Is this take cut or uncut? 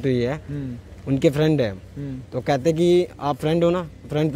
uncut